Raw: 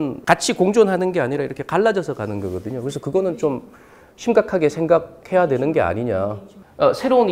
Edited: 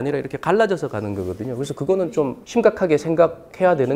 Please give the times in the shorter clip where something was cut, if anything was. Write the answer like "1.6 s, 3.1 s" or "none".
2.4 s